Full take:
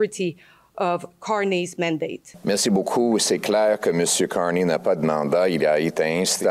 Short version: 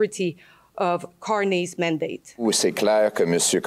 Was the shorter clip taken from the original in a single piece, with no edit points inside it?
no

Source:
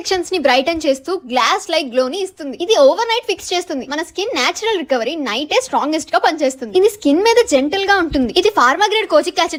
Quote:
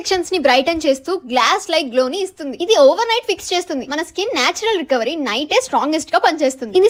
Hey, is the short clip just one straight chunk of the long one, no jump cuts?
yes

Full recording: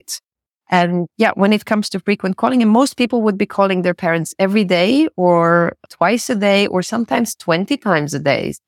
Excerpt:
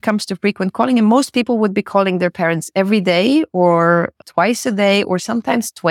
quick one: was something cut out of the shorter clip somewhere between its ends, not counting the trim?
no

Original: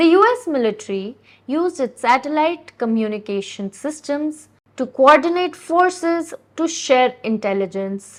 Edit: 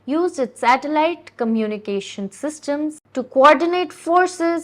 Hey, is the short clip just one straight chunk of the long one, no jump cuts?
no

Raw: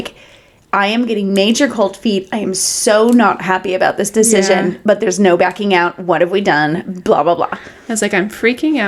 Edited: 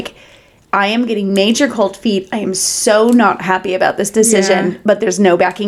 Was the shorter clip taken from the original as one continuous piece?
yes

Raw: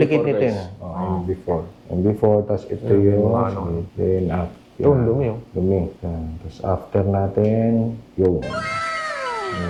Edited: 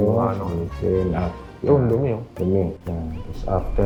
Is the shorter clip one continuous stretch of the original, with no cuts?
yes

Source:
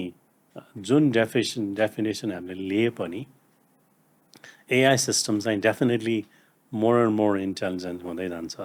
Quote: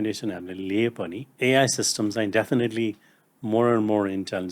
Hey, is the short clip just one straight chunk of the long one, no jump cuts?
no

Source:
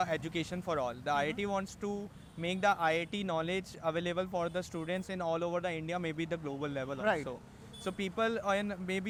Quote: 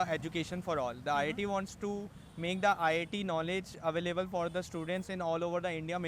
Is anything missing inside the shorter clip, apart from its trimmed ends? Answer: no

